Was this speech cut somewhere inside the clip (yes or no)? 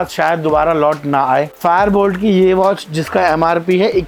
no